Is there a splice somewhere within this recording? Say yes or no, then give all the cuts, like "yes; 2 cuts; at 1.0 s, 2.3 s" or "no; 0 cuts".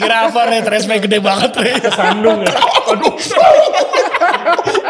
no; 0 cuts